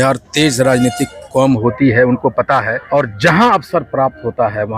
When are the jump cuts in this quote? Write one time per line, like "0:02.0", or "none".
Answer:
0:02.8